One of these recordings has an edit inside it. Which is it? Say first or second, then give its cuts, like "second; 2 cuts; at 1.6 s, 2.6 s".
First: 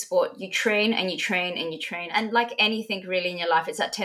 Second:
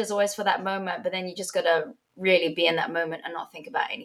first; 1 cut; at 2.1 s